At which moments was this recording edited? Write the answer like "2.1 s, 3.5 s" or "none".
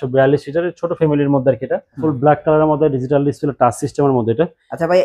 1.9 s

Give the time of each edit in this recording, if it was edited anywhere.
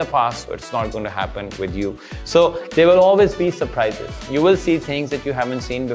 none

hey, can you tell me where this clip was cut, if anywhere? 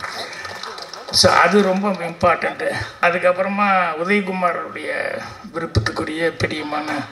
3.0 s

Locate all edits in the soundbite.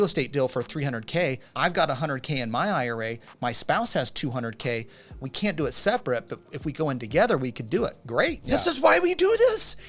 1.5 s, 8.4 s

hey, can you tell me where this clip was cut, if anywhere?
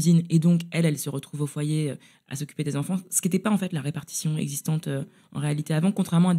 none

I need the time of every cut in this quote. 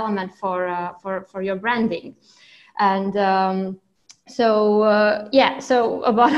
none

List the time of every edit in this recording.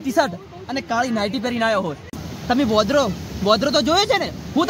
2.0 s

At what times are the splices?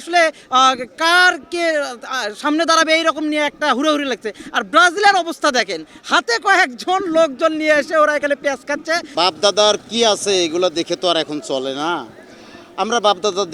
9.1 s

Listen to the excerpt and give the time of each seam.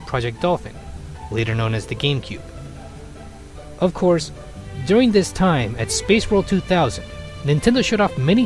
7.4 s

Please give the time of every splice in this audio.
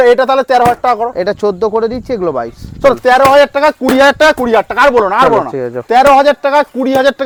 none

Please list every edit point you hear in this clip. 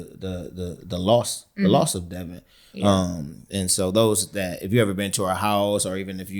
none

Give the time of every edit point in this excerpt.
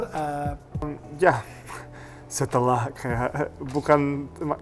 0.9 s

